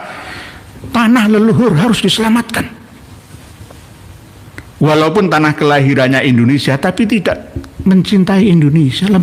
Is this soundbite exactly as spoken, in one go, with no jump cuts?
yes; 0 cuts

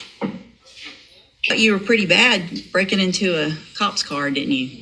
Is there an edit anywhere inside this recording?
yes; 1 cut; at 1.5 s

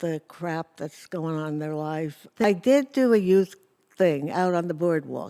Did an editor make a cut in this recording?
yes; 1 cut; at 2.4 s

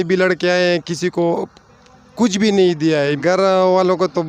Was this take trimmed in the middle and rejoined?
yes; 1 cut; at 3.1 s

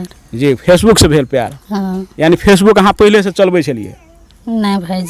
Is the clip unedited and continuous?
yes; 0 cuts

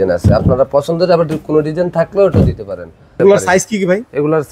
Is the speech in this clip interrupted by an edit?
yes; 1 cut; at 3.1 s

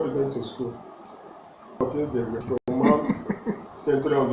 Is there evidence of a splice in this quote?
yes; 1 cut; at 2.1 s

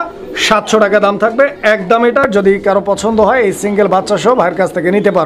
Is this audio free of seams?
no; 1 cut; at 2.2 s

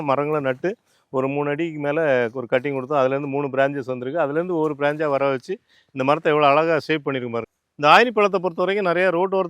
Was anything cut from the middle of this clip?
yes; 1 cut; at 7.4 s

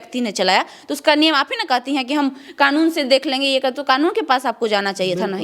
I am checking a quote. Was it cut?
no; 0 cuts

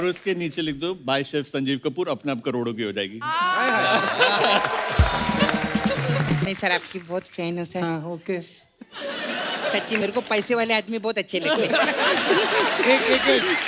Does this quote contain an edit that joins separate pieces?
yes; 1 cut; at 6.4 s

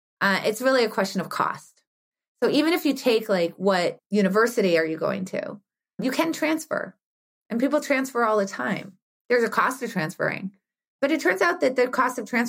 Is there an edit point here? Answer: yes; 3 cuts; at 4.0 s, 6.0 s, 10.9 s

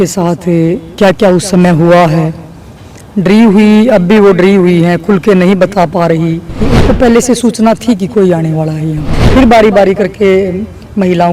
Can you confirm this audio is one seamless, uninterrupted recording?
no; 2 cuts; at 6.7 s, 9.1 s

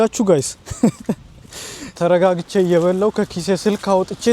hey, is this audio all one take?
no; 1 cut; at 1.9 s

